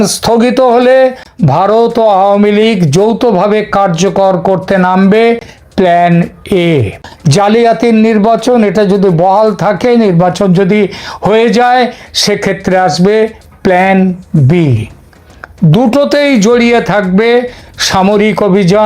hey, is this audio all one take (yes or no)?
no